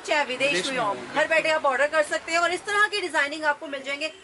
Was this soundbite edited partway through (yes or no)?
no